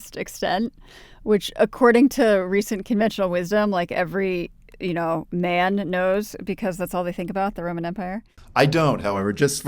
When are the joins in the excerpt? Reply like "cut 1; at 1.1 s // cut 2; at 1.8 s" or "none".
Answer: cut 1; at 8.3 s